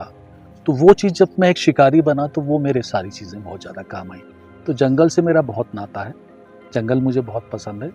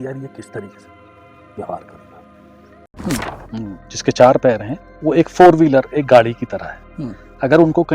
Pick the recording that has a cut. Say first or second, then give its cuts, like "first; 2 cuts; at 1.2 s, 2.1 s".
second; 1 cut; at 2.9 s